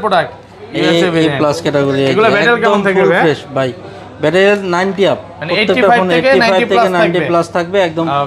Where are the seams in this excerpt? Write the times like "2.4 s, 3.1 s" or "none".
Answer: none